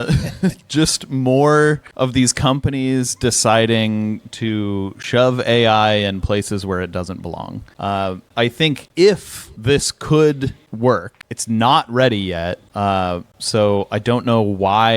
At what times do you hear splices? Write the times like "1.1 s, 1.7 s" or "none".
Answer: none